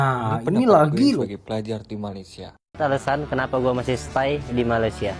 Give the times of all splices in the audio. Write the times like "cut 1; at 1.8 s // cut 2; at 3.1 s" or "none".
cut 1; at 2.8 s